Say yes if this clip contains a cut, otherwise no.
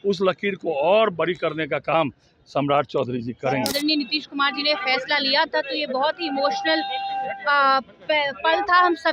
yes